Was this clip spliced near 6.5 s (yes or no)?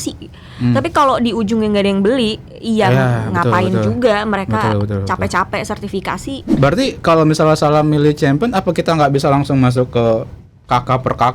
yes